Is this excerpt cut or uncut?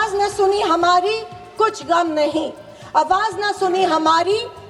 uncut